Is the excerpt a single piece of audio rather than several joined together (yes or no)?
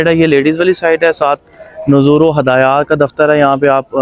yes